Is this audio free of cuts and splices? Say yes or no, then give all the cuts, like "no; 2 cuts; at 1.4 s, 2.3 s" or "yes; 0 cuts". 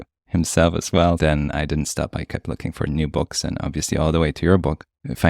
no; 1 cut; at 1.2 s